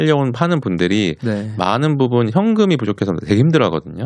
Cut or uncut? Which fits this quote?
uncut